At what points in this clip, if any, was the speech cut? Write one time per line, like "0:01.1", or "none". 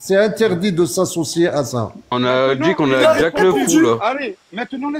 0:02.1